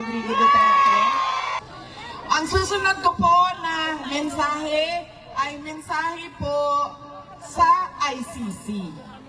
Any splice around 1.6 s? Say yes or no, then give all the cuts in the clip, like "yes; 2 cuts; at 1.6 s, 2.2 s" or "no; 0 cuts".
yes; 1 cut; at 1.6 s